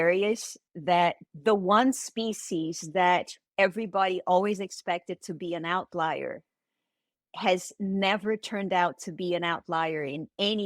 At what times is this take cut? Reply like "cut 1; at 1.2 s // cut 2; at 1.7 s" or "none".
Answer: cut 1; at 1.3 s